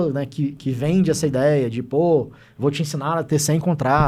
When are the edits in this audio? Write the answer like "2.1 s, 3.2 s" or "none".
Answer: none